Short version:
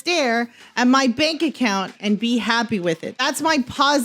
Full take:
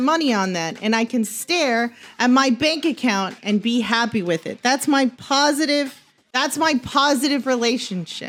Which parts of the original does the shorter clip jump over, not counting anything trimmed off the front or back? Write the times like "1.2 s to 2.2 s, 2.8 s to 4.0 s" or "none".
4.5 s to 6.2 s